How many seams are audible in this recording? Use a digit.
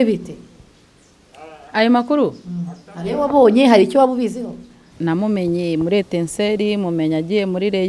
1